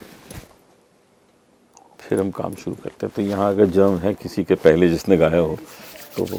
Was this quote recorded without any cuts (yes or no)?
yes